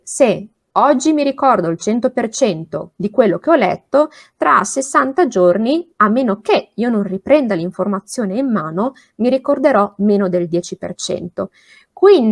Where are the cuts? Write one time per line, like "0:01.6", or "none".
none